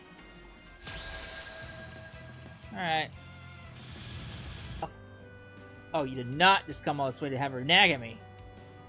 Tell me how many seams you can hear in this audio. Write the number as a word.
one